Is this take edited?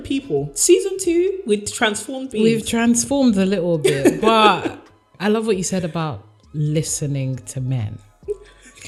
no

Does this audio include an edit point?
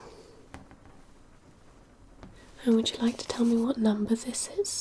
yes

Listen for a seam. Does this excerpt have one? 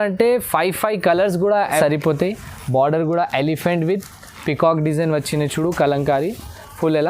yes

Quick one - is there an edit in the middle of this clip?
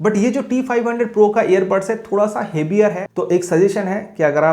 yes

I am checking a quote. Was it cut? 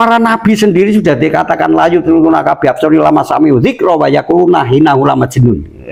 no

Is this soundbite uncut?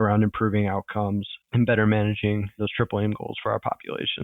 yes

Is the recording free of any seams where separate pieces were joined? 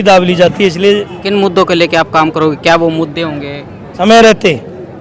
no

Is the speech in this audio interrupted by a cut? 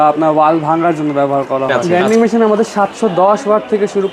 yes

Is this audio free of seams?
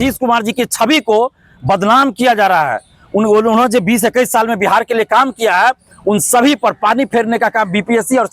yes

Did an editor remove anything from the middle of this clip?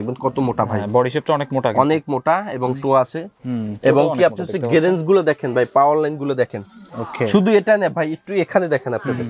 no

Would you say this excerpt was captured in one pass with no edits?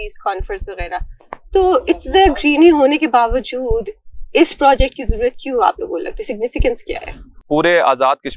no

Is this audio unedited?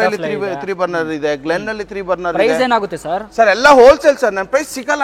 yes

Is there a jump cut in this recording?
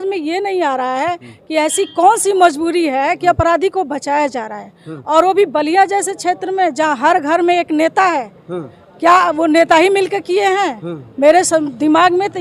no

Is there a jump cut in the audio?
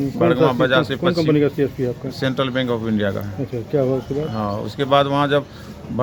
no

